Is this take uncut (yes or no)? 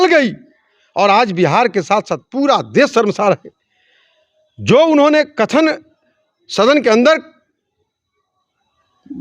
yes